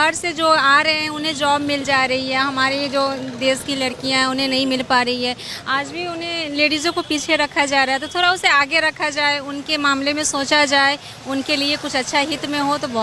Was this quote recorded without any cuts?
yes; 0 cuts

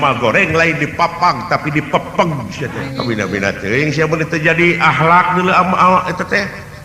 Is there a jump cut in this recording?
yes; 1 cut; at 2.8 s

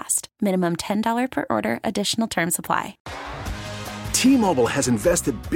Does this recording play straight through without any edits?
no; 1 cut; at 3.0 s

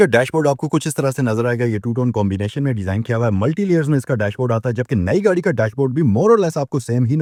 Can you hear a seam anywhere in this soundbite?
no; 0 cuts

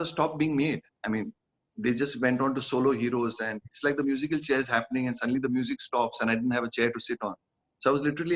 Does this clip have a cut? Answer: no; 0 cuts

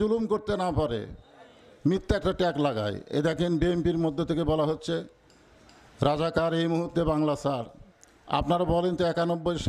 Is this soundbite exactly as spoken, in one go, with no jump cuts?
yes; 0 cuts

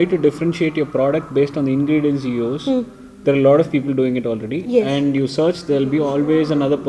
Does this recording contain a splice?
no; 0 cuts

